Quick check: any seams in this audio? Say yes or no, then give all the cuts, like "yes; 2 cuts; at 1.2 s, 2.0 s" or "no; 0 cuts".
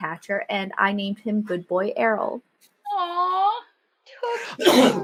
no; 0 cuts